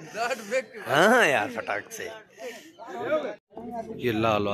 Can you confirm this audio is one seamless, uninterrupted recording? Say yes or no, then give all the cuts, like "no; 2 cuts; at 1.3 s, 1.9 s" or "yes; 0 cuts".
no; 1 cut; at 3.5 s